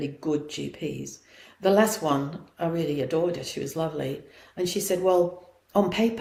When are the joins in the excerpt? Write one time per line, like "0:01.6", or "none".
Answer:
none

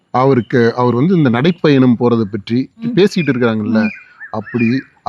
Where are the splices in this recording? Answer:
0:02.9

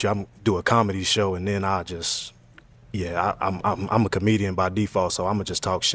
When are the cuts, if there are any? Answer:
none

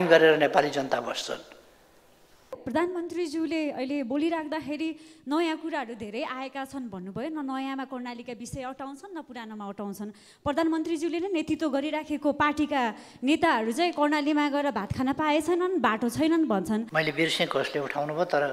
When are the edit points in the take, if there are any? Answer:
0:02.6
0:16.9

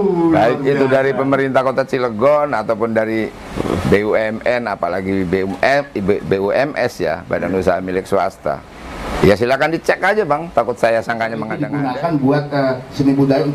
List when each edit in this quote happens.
0:11.6

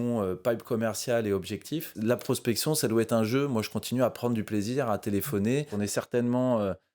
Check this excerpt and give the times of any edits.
0:01.9
0:05.7

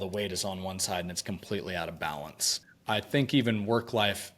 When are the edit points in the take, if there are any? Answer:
0:02.6

